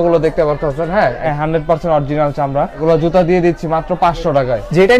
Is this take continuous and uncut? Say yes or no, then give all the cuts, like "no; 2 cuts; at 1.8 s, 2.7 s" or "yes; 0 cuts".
no; 2 cuts; at 1.3 s, 2.7 s